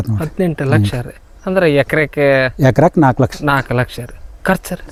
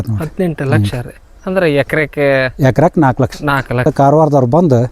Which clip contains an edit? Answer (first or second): second